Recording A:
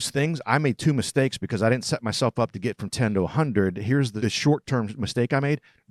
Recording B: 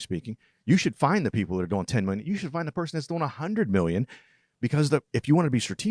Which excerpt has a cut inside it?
A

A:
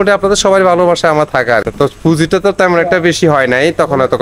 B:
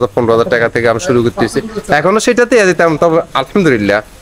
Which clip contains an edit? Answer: A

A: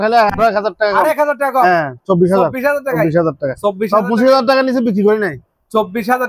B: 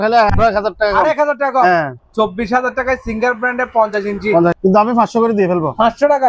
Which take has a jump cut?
B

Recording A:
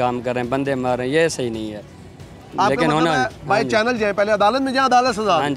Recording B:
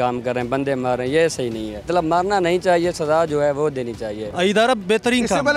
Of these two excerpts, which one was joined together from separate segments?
B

